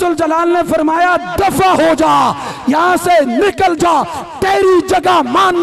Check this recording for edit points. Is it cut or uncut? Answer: uncut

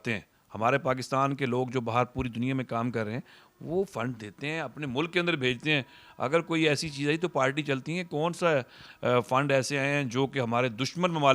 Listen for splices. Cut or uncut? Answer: uncut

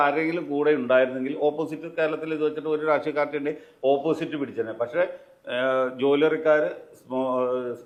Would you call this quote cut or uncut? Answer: uncut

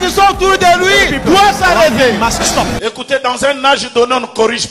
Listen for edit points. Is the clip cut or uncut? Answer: cut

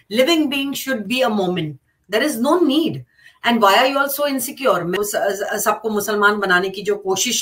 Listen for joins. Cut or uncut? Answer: cut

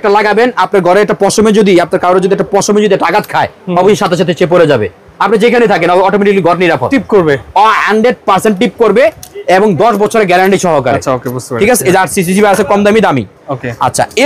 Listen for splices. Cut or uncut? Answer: uncut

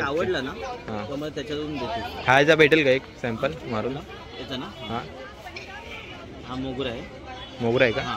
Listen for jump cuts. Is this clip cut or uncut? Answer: uncut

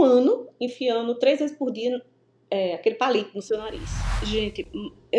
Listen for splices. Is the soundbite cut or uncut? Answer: cut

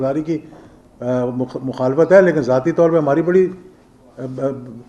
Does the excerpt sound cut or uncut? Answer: uncut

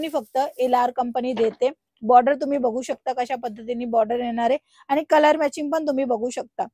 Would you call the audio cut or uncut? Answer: uncut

